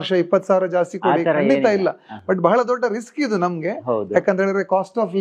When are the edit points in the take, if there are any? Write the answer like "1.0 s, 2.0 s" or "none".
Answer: none